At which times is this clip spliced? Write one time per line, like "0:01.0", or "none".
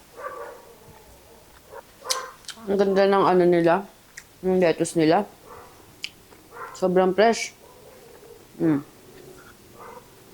0:01.8